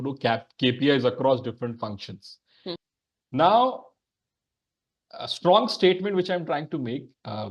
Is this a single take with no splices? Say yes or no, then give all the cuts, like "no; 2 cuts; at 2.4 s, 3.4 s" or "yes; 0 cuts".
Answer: no; 1 cut; at 2.8 s